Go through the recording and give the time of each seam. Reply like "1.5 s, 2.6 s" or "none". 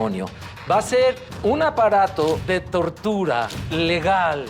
1.3 s, 2.4 s, 3.6 s

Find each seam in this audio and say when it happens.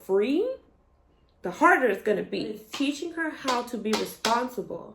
2.7 s

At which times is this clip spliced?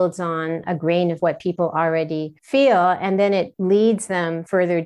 none

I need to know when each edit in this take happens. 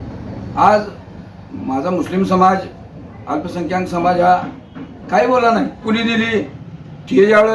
5.8 s

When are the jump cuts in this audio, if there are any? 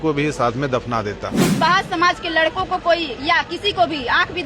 1.4 s

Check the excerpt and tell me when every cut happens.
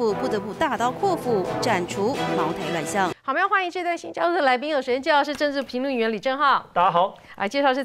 3.2 s

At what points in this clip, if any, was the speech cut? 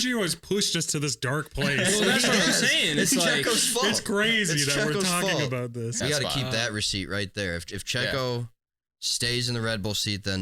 6.0 s

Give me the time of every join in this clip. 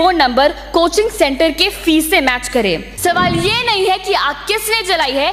2.9 s

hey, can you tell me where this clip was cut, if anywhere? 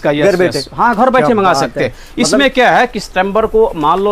none

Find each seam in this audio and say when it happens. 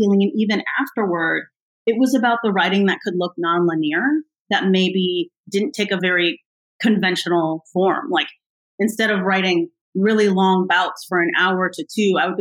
6.0 s

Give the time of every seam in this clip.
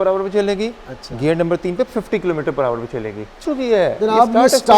3.4 s

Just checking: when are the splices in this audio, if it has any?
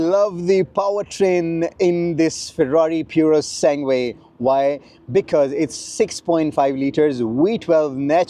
none

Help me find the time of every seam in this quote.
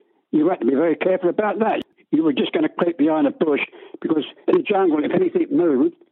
1.8 s

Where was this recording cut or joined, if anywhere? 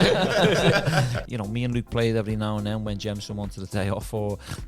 1.2 s

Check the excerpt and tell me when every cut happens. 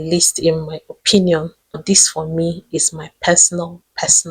1.8 s

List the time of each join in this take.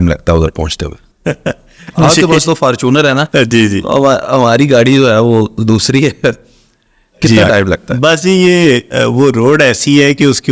none

